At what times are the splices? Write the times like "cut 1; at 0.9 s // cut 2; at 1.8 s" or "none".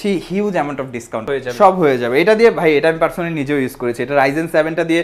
cut 1; at 1.2 s